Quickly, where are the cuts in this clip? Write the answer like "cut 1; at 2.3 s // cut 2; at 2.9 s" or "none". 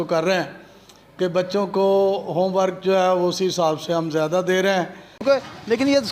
cut 1; at 5.2 s